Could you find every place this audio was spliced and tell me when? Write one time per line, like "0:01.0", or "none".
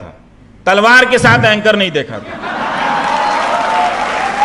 none